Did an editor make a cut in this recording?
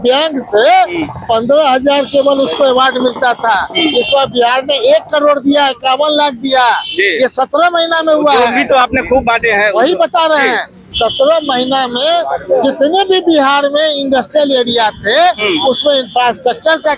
no; 0 cuts

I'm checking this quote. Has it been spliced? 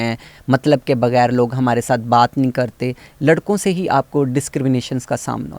yes; 1 cut; at 3.1 s

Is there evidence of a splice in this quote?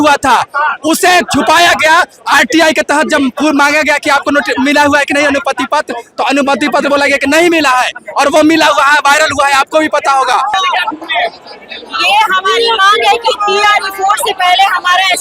yes; 1 cut; at 10.5 s

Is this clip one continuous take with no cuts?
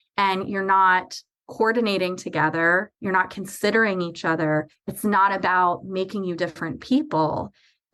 no; 1 cut; at 4.8 s

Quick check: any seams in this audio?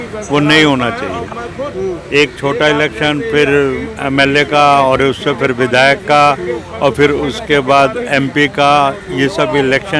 no; 0 cuts

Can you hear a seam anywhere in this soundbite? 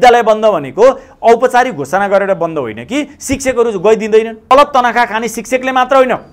yes; 1 cut; at 4.5 s

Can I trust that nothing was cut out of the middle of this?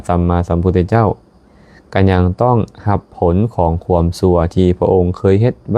yes; 0 cuts

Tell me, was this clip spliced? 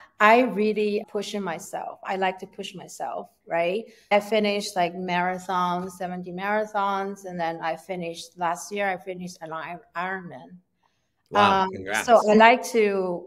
yes; 2 cuts; at 1.0 s, 4.1 s

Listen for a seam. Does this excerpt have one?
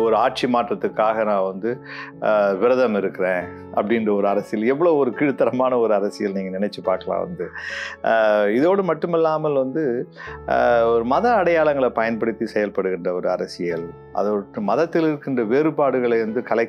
no; 0 cuts

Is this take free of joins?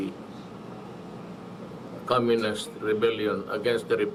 yes; 0 cuts

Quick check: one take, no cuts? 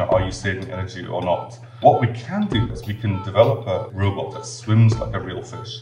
no; 3 cuts; at 1.8 s, 2.7 s, 4.3 s

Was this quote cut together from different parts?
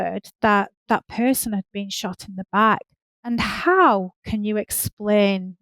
yes; 1 cut; at 3.2 s

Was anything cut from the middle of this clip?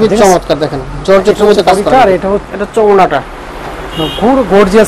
yes; 1 cut; at 2.5 s

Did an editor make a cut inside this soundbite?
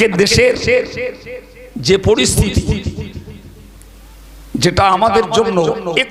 no; 0 cuts

